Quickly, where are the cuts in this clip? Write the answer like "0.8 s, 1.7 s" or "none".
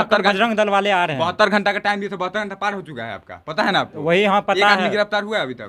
none